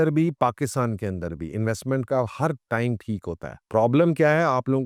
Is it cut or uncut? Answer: uncut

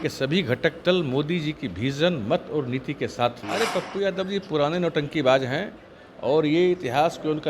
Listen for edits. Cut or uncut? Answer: cut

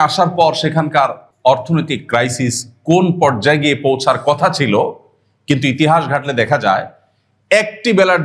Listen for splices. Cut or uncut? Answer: cut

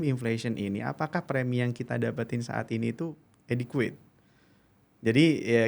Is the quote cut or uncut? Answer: uncut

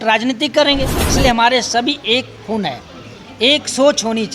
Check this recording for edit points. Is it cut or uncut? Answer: cut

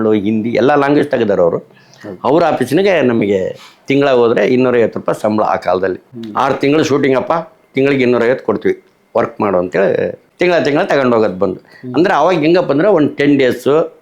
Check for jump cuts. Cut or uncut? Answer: uncut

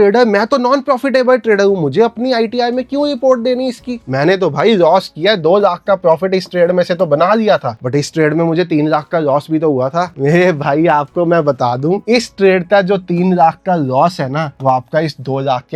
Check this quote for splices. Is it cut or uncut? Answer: uncut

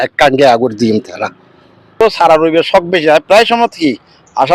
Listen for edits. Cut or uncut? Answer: cut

